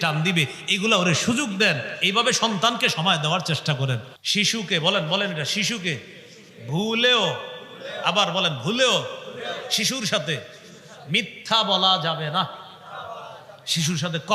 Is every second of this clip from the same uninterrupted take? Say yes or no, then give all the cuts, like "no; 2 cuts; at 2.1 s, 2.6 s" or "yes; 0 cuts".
no; 1 cut; at 4.1 s